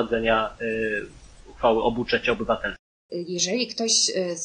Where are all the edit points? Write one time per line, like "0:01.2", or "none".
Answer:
0:03.0